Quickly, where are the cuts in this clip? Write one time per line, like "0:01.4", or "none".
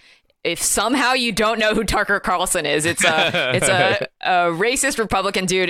none